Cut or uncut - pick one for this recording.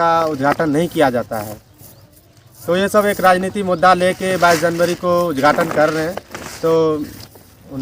uncut